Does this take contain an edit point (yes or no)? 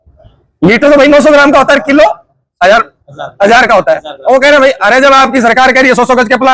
no